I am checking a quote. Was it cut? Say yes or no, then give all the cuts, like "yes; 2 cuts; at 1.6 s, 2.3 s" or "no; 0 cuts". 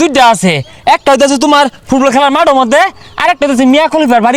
no; 0 cuts